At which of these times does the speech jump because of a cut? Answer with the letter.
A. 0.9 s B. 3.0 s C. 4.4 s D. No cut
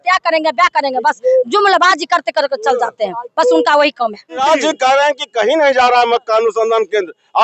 C